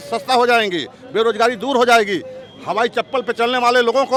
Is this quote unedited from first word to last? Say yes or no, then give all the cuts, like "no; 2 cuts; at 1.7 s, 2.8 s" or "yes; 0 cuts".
yes; 0 cuts